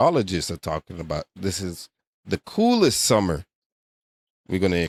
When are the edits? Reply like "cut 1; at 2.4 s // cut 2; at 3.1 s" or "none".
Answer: none